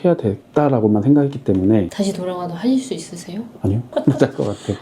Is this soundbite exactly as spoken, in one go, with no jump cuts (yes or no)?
no